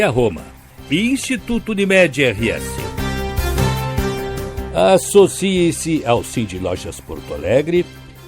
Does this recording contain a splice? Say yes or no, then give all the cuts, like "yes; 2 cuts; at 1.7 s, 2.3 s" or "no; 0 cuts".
yes; 2 cuts; at 2.7 s, 4.5 s